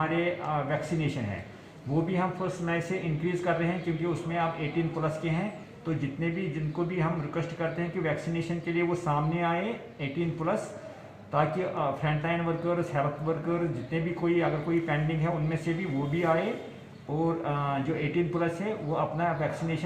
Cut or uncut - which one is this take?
cut